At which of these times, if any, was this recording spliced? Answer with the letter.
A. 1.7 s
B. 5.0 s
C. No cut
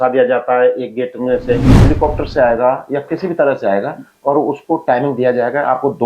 A